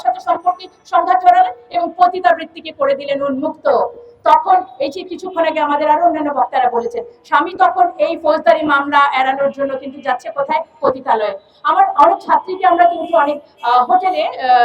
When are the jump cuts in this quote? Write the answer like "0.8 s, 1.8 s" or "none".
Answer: none